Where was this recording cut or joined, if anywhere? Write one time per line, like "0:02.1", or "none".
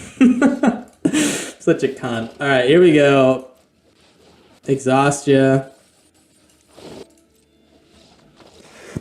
0:07.0